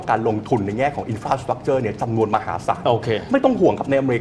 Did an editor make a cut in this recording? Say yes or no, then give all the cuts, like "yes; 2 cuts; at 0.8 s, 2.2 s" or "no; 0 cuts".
no; 0 cuts